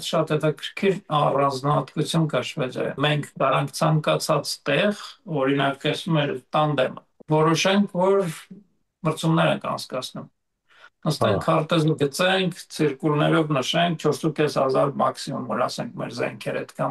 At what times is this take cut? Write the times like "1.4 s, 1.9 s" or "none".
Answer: 3.0 s, 7.1 s